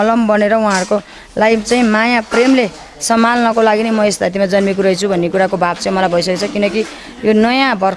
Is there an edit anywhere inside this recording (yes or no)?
no